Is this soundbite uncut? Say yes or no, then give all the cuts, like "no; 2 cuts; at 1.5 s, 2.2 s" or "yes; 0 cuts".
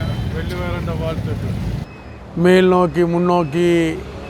no; 1 cut; at 1.8 s